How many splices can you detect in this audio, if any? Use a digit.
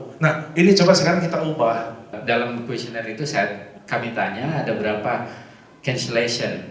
1